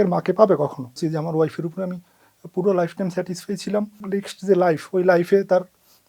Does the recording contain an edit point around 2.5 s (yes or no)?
no